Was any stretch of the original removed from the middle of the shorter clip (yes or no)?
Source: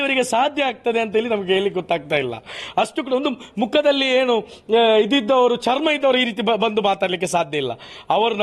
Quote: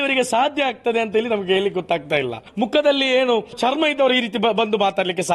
yes